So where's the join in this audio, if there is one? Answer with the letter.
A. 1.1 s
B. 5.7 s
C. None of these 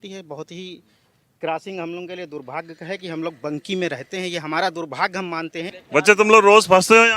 B